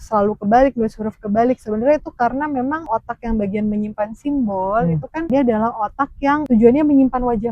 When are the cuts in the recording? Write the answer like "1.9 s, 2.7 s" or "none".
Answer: 2.9 s, 5.3 s, 6.4 s